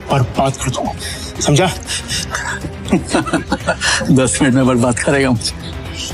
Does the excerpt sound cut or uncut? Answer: uncut